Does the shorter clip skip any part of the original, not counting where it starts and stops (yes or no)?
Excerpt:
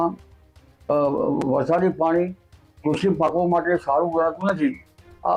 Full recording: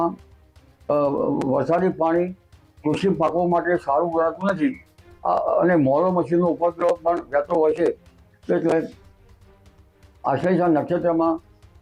no